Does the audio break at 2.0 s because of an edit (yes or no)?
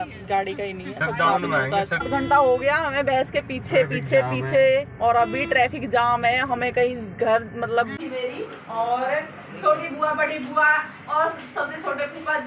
yes